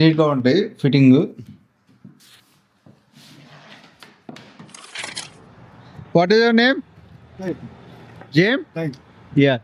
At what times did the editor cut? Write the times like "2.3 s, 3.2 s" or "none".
5.0 s